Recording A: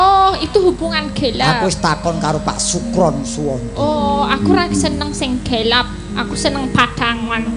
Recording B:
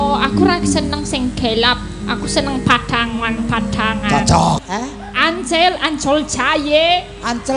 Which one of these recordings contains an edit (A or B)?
B